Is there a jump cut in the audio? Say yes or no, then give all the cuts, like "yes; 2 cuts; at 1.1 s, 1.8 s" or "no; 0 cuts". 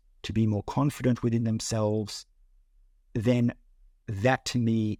no; 0 cuts